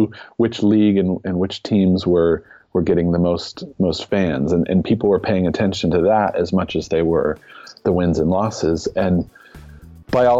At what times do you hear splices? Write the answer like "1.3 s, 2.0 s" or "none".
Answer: none